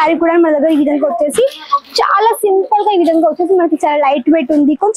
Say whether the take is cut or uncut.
uncut